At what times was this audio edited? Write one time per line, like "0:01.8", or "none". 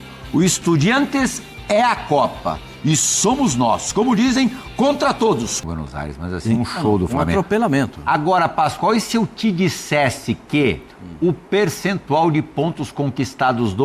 0:05.5